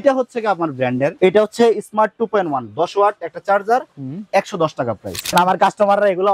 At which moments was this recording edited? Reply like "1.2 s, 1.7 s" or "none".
1.1 s, 5.3 s